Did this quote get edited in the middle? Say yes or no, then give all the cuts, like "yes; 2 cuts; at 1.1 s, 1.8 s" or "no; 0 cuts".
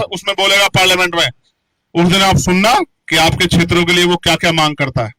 no; 0 cuts